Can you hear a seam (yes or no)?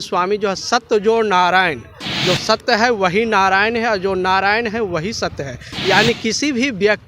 yes